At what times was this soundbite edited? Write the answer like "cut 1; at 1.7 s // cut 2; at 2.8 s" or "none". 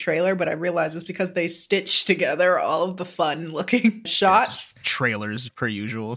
cut 1; at 4.1 s